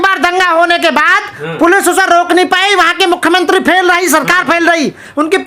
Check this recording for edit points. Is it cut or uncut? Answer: uncut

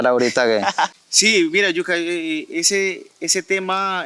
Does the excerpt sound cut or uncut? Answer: cut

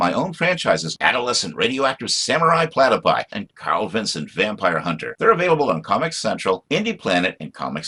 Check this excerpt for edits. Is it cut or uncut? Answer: uncut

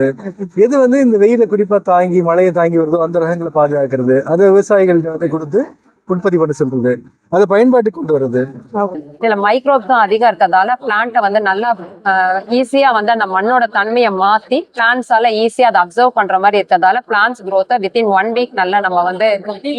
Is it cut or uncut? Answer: cut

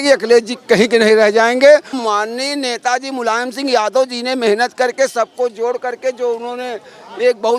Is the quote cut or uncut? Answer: cut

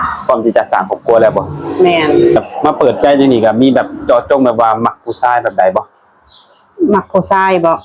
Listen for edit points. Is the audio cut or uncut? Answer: cut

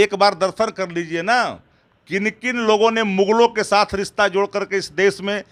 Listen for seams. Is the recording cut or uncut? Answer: uncut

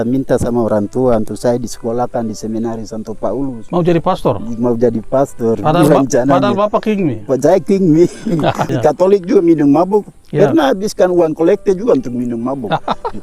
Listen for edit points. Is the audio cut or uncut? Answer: cut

